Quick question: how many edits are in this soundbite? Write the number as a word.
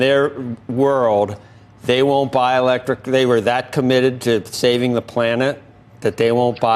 zero